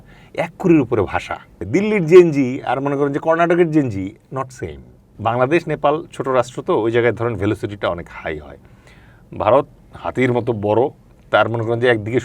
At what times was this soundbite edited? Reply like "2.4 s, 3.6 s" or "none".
1.6 s, 5.1 s